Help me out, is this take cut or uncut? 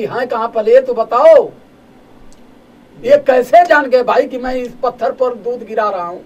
uncut